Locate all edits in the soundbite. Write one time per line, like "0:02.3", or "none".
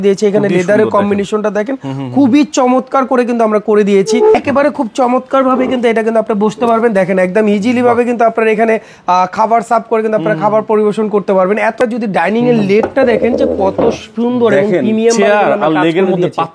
0:04.3
0:11.8